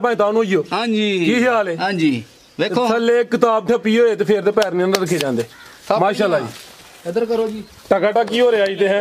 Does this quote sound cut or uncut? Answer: uncut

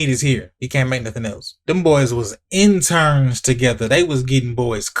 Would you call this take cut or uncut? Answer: cut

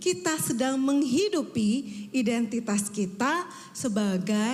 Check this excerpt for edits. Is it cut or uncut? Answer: uncut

